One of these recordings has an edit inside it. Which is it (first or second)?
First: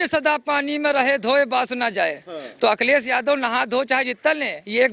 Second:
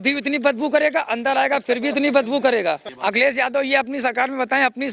second